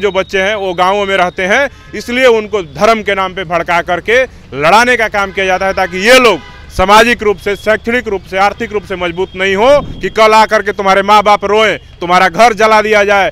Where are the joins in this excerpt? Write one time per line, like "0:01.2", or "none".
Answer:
0:10.0